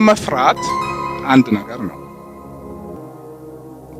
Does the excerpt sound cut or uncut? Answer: uncut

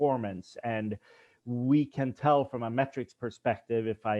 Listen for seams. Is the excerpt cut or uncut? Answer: uncut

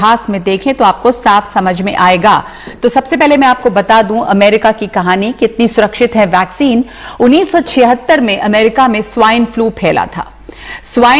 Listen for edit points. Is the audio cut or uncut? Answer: uncut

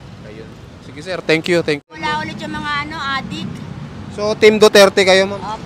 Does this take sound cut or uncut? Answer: cut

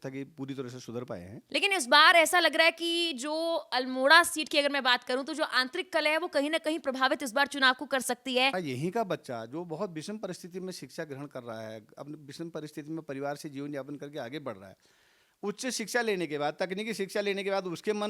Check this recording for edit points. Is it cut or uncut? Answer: cut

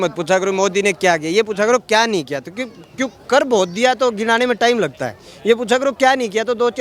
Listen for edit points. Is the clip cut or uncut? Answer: uncut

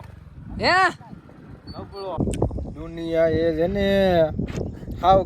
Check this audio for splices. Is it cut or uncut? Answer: cut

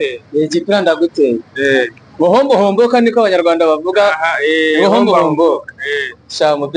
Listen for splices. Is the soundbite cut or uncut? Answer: uncut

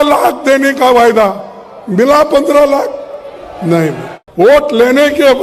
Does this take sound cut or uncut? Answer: cut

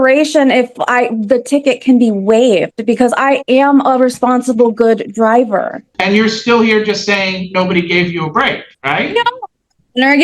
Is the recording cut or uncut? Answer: cut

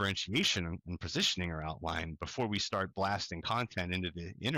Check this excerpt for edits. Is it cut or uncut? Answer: uncut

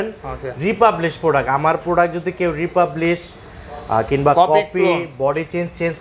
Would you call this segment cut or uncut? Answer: uncut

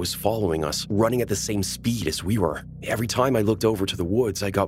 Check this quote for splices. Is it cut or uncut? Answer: uncut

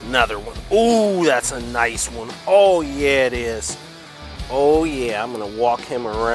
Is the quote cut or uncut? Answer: uncut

